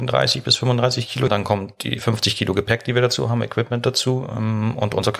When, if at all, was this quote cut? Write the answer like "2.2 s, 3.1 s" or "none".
1.3 s